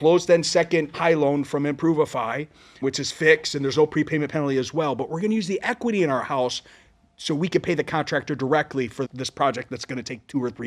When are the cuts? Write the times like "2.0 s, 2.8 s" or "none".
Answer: 0.9 s, 2.8 s, 9.1 s